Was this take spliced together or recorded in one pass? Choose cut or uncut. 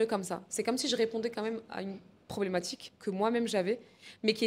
cut